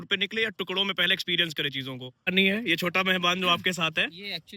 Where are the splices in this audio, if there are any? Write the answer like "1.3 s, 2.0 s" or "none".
2.3 s